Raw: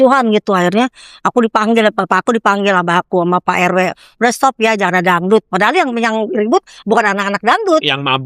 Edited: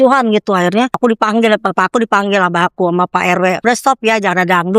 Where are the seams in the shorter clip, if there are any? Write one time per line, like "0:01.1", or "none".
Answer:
0:00.9
0:03.6